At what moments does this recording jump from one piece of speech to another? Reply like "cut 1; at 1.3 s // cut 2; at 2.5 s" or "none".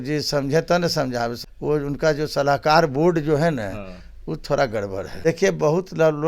cut 1; at 1.4 s // cut 2; at 5.0 s